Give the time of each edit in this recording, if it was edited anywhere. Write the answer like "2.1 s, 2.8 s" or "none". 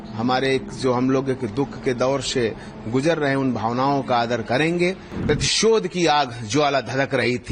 5.1 s